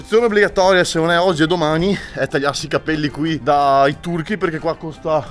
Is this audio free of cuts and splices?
yes; 0 cuts

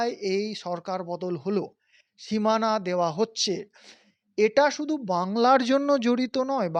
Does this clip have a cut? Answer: no; 0 cuts

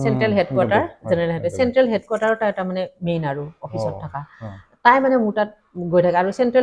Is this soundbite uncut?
yes; 0 cuts

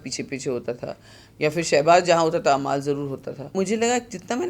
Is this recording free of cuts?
no; 1 cut; at 3.5 s

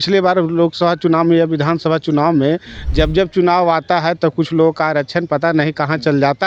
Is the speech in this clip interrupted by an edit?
no; 0 cuts

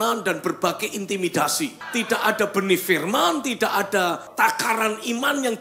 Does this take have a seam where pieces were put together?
yes; 2 cuts; at 1.8 s, 4.3 s

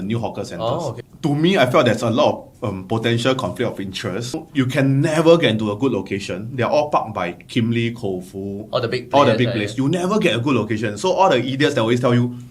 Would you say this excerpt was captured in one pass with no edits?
no; 2 cuts; at 1.0 s, 4.3 s

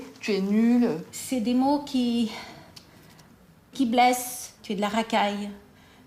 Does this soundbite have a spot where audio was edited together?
yes; 2 cuts; at 1.1 s, 4.6 s

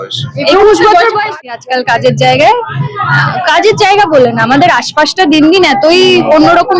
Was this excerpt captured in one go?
no; 1 cut; at 1.5 s

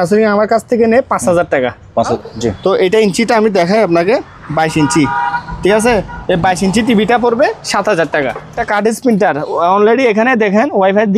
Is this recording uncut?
no; 2 cuts; at 2.0 s, 8.6 s

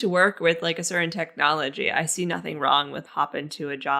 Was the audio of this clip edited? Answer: yes; 1 cut; at 3.0 s

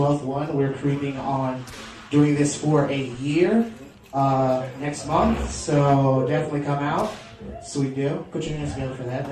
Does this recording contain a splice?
no; 0 cuts

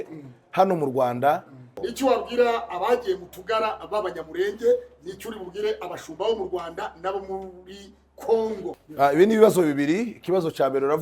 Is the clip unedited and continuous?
no; 2 cuts; at 1.8 s, 8.8 s

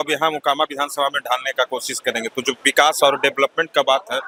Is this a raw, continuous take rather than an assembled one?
yes; 0 cuts

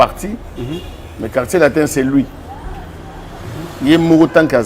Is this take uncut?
yes; 0 cuts

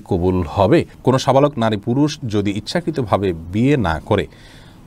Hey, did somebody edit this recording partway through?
yes; 1 cut; at 0.9 s

